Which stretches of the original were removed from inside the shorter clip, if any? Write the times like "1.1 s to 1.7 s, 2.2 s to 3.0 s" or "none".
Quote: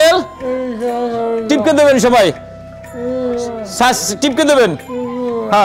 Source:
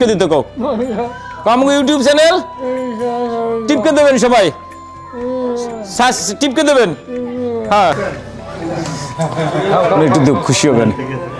none